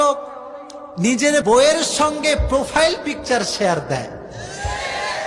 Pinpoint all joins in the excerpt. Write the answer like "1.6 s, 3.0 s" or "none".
1.4 s